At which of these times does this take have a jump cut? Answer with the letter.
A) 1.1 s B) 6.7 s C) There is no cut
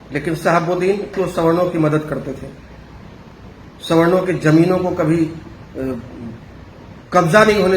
A